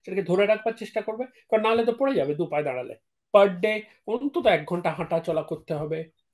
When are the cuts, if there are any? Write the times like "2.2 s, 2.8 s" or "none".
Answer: 3.2 s